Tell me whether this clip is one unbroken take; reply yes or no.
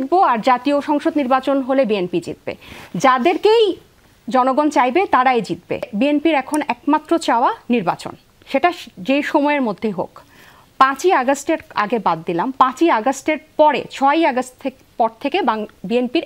no